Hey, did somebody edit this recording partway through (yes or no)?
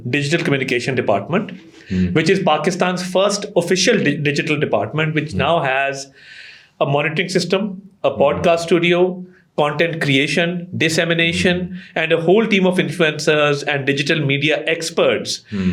no